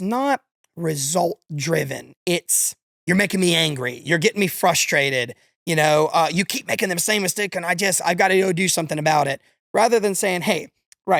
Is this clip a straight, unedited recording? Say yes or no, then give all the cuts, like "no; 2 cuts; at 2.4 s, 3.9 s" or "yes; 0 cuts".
yes; 0 cuts